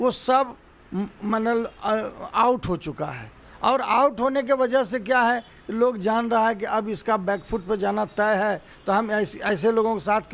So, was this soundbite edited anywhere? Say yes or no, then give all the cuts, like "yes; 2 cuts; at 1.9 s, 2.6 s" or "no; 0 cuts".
no; 0 cuts